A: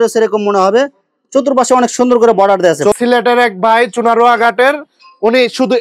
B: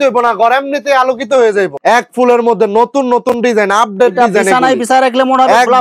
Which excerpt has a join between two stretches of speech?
A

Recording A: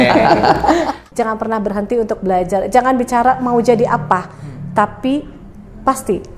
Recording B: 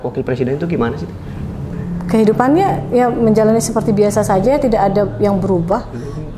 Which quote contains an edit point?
A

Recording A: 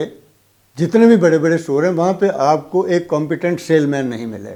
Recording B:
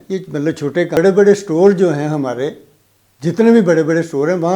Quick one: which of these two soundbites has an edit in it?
B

